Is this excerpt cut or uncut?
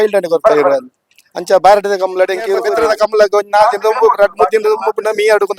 cut